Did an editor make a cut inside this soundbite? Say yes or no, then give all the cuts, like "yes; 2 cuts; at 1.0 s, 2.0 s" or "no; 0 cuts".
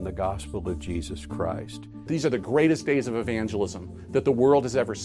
yes; 1 cut; at 1.9 s